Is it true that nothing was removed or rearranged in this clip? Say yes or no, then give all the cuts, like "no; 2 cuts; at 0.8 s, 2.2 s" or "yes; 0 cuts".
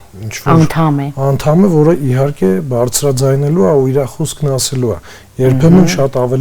yes; 0 cuts